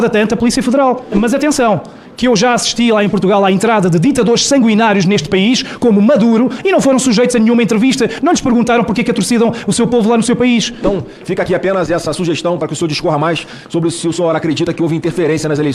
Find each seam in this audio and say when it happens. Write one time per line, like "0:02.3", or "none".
0:01.1
0:10.8